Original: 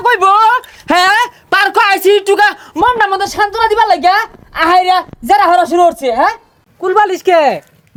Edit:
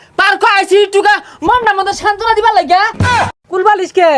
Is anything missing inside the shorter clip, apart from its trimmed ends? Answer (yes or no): yes